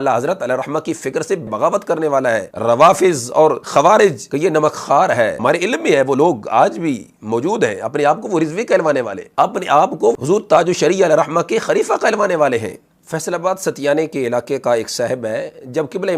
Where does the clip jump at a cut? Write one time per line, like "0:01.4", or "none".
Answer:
0:01.5
0:02.5
0:03.6
0:04.2
0:05.4
0:09.2